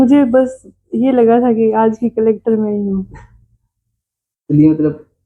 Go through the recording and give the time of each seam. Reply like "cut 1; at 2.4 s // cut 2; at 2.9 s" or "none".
none